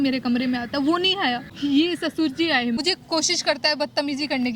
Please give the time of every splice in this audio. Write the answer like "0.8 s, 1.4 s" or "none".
1.5 s, 2.8 s